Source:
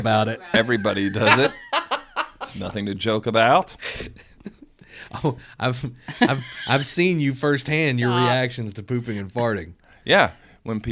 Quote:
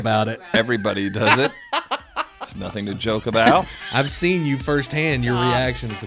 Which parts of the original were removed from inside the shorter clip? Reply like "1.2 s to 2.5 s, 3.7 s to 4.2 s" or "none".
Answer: 3.8 s to 6.5 s